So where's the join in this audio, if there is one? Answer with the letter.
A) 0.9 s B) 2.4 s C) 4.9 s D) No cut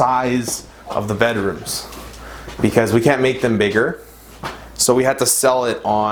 D